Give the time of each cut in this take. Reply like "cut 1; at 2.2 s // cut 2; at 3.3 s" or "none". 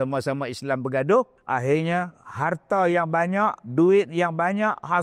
cut 1; at 1.4 s